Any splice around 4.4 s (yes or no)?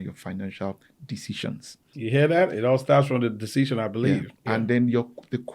no